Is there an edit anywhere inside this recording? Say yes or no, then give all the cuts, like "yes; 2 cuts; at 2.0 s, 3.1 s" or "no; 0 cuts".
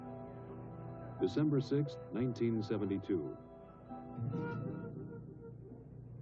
no; 0 cuts